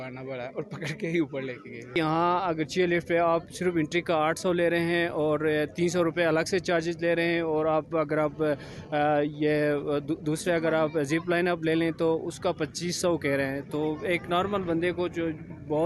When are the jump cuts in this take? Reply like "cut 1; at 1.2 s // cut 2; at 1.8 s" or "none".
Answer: cut 1; at 2.0 s